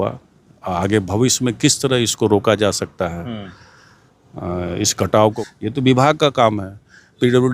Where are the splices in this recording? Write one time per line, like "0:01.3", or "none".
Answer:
0:05.3